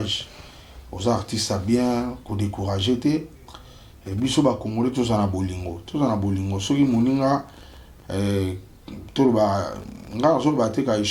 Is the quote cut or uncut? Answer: uncut